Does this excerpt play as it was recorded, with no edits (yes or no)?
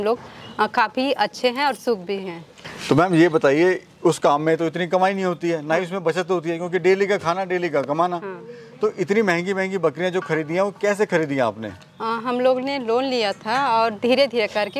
yes